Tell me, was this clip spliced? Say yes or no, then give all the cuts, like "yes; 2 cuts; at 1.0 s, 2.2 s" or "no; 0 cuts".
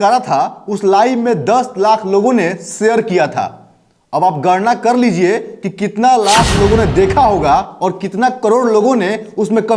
no; 0 cuts